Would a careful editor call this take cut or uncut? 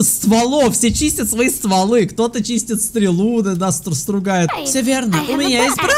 cut